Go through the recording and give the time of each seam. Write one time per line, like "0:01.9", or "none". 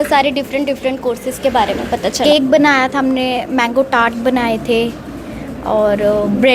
0:02.2